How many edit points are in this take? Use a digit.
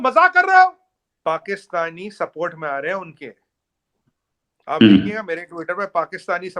0